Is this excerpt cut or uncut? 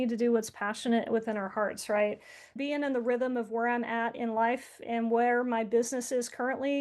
cut